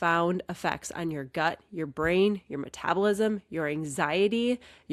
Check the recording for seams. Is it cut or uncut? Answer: uncut